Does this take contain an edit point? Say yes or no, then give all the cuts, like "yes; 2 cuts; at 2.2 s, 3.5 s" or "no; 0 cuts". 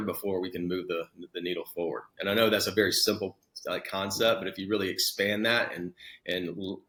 no; 0 cuts